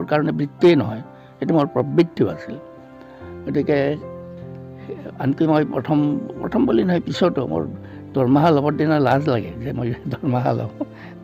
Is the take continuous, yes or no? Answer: yes